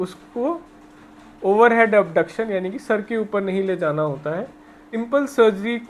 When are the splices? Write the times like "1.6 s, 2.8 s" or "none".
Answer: 4.8 s